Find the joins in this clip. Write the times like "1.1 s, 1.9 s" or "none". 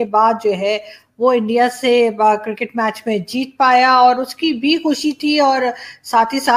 none